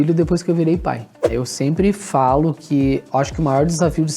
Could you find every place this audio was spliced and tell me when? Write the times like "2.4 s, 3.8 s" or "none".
1.2 s